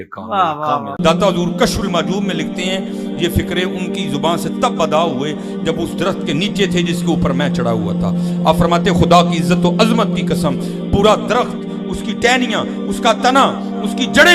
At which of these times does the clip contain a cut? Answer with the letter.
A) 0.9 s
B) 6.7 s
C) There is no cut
A